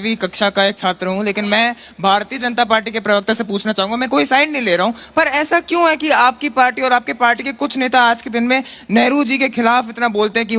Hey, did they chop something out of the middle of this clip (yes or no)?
no